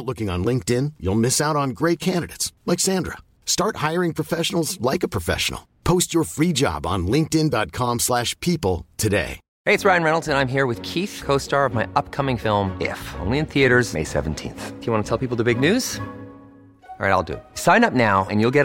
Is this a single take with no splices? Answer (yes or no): no